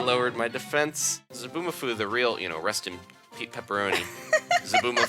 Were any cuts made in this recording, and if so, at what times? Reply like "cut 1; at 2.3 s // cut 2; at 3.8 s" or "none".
cut 1; at 1.4 s